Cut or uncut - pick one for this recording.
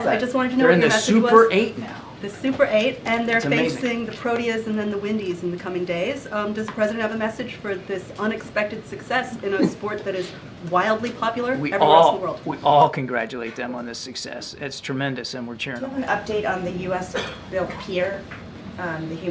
cut